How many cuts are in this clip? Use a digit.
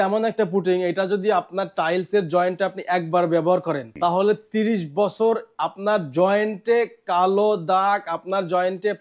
1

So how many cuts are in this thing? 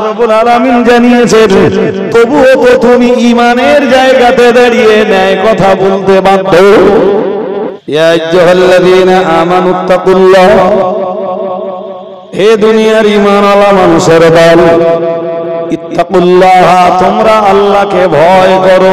1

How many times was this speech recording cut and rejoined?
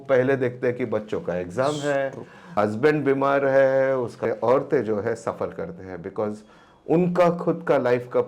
2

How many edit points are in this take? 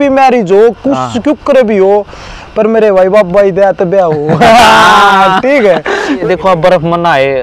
1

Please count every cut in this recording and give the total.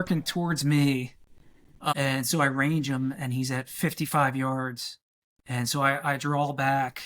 1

